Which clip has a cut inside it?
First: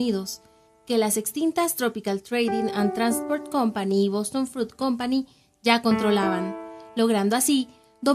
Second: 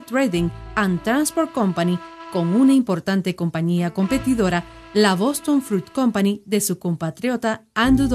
first; 1 cut; at 5.5 s

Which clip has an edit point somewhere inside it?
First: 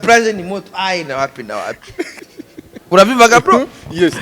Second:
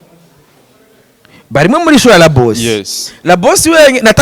first; 1 cut; at 2.1 s

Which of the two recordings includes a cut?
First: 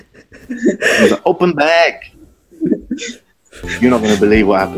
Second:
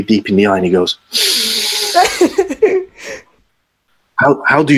second; 1 cut; at 3.8 s

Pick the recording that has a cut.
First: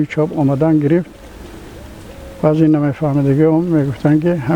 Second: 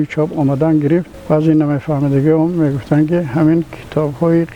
second; 1 cut; at 1.1 s

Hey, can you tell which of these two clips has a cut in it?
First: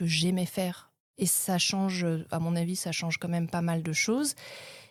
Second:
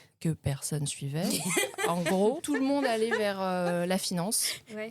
second; 1 cut; at 2.4 s

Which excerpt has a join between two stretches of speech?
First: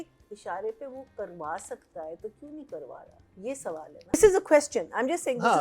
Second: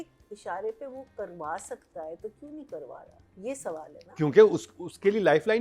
first; 1 cut; at 4.1 s

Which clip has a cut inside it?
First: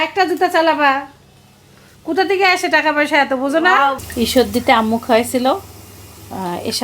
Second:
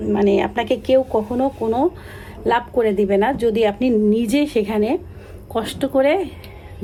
first; 1 cut; at 4.0 s

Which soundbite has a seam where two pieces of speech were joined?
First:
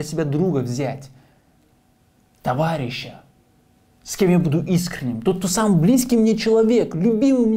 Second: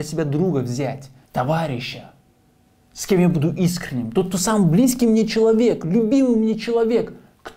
second; 1 cut; at 1.1 s

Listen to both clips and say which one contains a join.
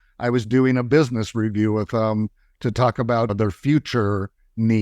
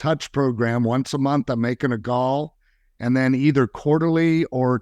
first; 1 cut; at 3.3 s

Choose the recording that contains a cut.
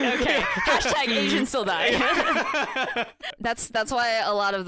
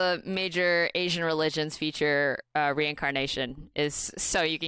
first; 1 cut; at 3.2 s

